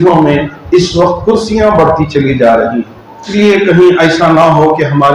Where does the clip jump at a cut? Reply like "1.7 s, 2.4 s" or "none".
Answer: 3.3 s